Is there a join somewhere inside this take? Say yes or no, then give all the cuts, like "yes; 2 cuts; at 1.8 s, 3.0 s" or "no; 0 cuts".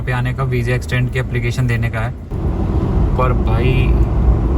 yes; 1 cut; at 2.3 s